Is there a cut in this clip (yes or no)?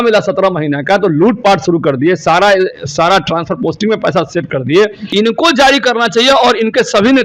yes